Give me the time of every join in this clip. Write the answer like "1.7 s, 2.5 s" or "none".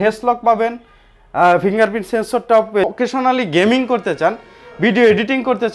2.8 s